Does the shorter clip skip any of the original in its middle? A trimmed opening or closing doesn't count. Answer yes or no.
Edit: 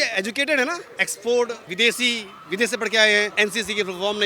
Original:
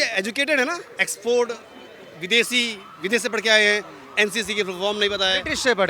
yes